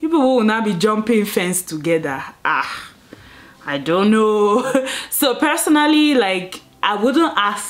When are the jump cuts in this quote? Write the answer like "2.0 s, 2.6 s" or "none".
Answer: none